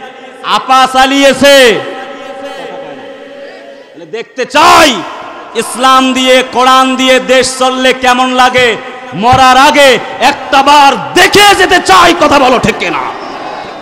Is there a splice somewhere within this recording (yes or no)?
no